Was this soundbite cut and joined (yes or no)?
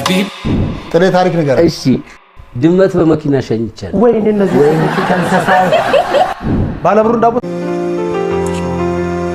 yes